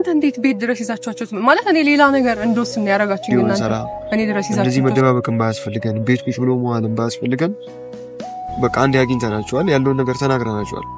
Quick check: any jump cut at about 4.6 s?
yes; 1 cut; at 4.6 s

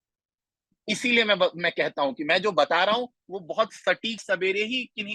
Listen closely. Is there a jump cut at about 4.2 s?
yes; 1 cut; at 4.2 s

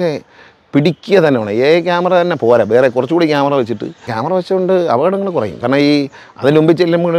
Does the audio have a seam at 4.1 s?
yes; 1 cut; at 4.1 s

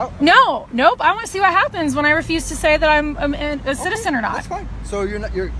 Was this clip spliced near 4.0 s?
no; 0 cuts

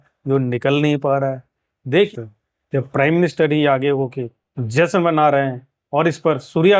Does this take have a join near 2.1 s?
yes; 1 cut; at 2.1 s

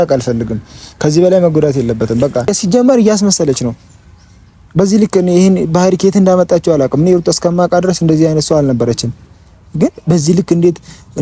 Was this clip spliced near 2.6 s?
yes; 1 cut; at 2.6 s

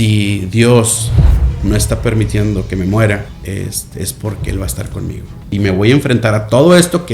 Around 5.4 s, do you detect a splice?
yes; 2 cuts; at 3.3 s, 5.4 s

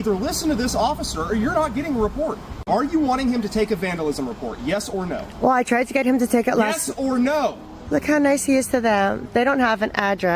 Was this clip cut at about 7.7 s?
yes; 2 cuts; at 2.5 s, 7.7 s

